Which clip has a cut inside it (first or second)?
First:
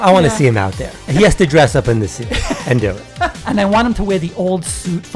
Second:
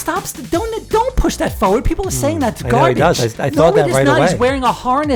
first